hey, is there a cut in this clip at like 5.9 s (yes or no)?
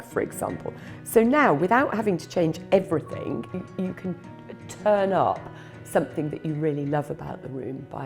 no